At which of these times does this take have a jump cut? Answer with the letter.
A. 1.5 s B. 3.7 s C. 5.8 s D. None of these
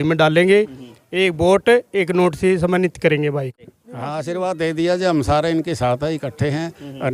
B